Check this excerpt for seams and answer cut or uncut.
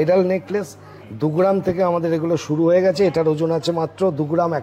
uncut